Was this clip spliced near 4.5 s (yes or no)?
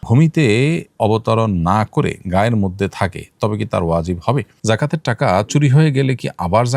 yes